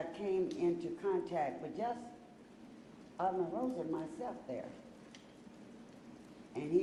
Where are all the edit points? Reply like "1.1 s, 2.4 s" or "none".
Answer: none